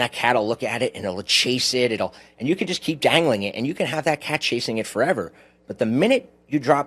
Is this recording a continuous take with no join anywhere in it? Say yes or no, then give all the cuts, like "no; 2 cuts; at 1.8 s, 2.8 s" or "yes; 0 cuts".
yes; 0 cuts